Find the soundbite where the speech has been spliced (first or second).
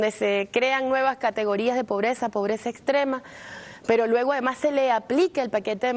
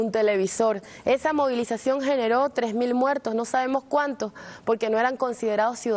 second